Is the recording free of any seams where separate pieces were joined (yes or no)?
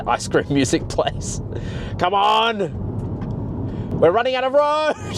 yes